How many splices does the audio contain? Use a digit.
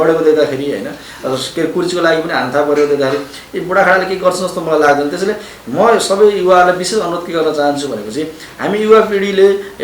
0